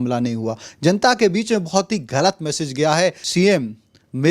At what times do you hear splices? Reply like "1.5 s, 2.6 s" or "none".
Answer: 3.2 s